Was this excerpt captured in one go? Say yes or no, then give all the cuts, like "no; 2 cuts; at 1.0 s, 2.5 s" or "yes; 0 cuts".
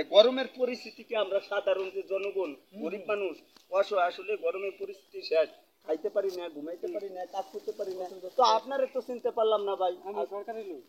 yes; 0 cuts